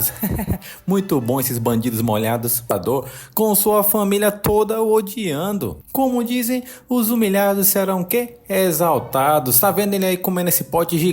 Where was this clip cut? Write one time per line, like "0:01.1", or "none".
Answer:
0:02.7